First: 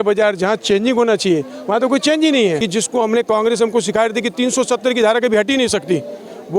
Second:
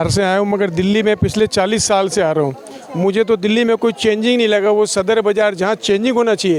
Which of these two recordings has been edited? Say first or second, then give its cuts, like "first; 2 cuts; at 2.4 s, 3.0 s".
first; 1 cut; at 2.6 s